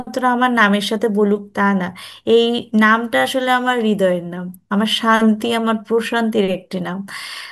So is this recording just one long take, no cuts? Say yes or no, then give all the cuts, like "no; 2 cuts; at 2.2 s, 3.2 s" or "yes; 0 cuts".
yes; 0 cuts